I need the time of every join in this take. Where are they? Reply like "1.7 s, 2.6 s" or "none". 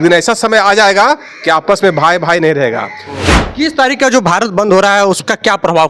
3.3 s